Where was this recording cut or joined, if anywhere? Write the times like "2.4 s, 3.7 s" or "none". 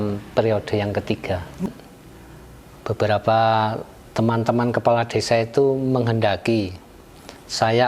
1.7 s